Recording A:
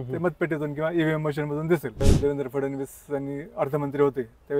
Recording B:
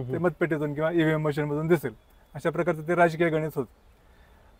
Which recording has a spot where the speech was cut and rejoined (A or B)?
A